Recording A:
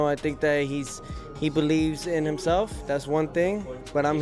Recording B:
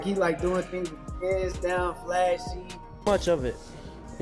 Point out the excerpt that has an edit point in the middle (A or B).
B